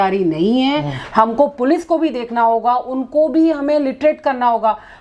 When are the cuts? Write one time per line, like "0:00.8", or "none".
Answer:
none